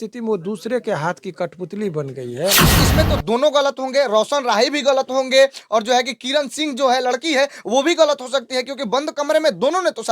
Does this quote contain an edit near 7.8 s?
no; 1 cut; at 2.8 s

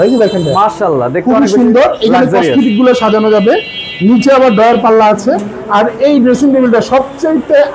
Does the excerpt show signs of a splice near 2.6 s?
no; 0 cuts

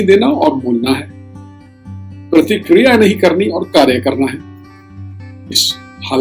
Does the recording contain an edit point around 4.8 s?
yes; 1 cut; at 4.8 s

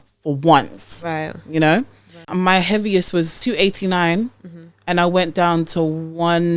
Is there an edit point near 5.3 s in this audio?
no; 2 cuts; at 2.3 s, 3.3 s

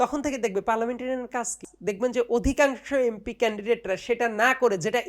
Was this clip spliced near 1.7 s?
yes; 1 cut; at 1.7 s

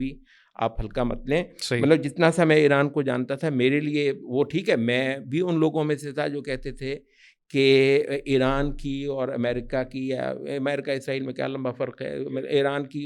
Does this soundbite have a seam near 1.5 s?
no; 0 cuts

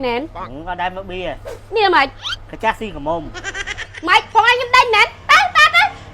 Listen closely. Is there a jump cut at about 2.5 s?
no; 1 cut; at 3.8 s

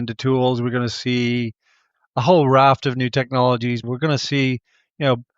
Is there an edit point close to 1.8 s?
no; 1 cut; at 3.8 s

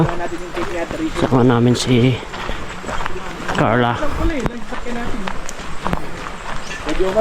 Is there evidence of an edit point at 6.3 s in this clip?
no; 0 cuts

